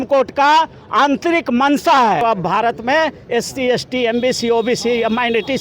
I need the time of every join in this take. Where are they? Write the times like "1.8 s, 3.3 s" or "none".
2.2 s

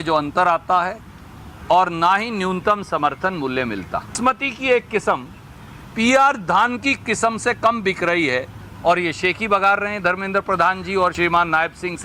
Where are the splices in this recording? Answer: 4.2 s, 11.1 s

